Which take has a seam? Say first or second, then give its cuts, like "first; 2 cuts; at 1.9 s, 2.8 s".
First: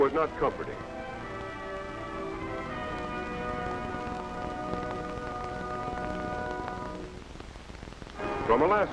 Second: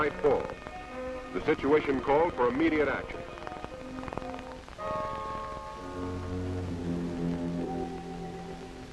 second; 1 cut; at 3.9 s